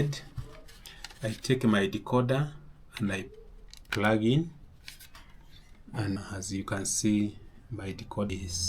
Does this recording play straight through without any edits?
no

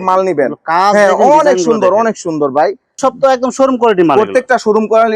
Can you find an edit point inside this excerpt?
yes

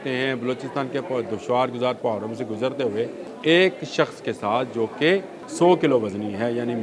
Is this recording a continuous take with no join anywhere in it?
no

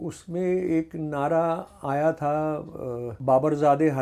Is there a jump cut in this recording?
yes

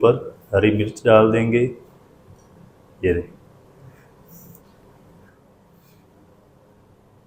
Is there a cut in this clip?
no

